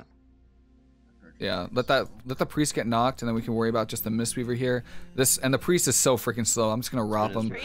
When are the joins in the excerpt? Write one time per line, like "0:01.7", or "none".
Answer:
none